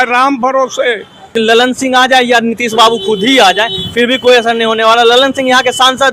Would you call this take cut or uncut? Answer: cut